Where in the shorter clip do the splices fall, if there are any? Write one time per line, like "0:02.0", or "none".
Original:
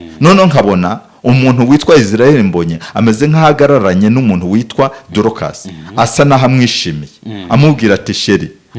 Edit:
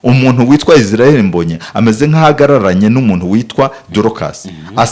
none

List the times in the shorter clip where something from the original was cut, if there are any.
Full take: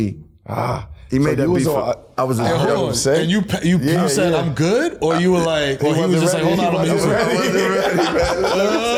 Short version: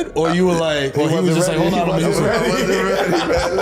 none

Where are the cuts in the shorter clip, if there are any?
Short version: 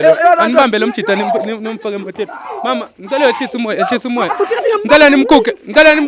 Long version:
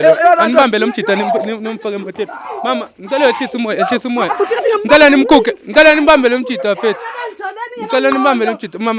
none

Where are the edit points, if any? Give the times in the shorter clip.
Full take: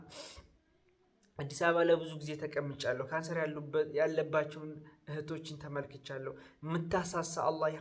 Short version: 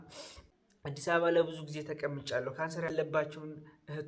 0:01.1
0:02.9

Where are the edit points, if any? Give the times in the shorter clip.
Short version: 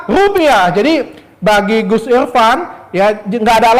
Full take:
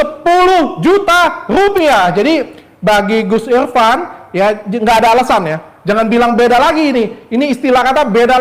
none

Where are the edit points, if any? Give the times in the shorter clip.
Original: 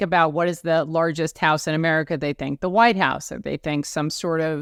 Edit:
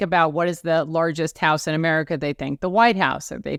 none

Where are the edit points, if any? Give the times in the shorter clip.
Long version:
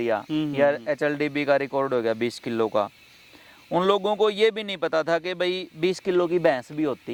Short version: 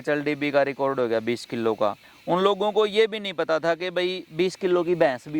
0:02.1

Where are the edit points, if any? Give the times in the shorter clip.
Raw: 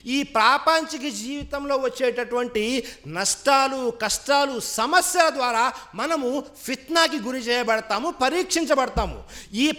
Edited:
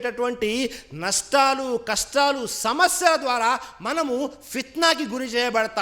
none

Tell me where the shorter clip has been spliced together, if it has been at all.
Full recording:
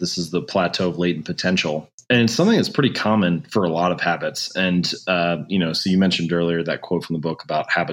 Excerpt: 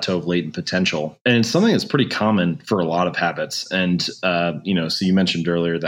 0:01.1

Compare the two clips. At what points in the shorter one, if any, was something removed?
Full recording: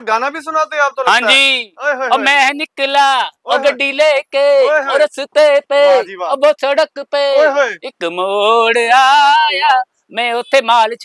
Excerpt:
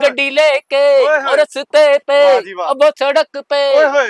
none

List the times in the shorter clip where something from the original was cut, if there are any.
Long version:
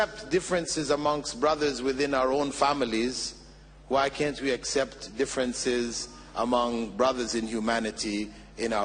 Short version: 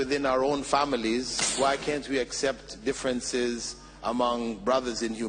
0:01.4

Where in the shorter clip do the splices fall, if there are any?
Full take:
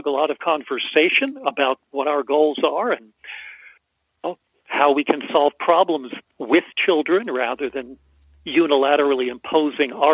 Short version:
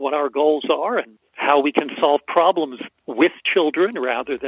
0:01.2

